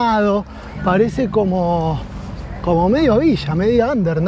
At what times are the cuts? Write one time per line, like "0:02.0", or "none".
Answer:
none